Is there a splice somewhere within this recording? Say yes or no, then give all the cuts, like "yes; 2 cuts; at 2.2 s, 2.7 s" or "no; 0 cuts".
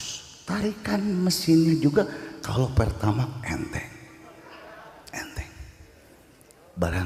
no; 0 cuts